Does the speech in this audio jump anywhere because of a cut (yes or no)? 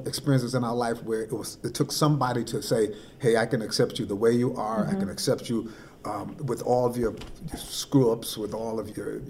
no